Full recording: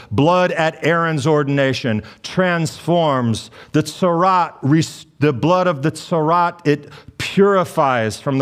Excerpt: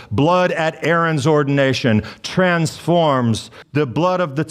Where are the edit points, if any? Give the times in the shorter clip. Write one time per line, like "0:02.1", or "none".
0:03.5